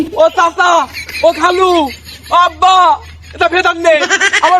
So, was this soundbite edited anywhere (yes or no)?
no